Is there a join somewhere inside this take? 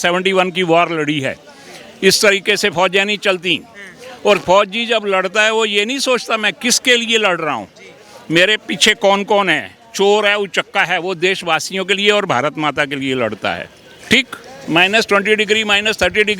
yes; 1 cut; at 14.5 s

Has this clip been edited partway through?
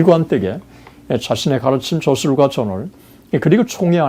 no; 0 cuts

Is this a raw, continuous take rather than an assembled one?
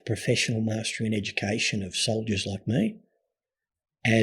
yes; 0 cuts

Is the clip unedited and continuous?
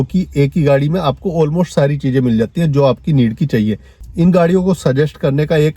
no; 1 cut; at 3.9 s

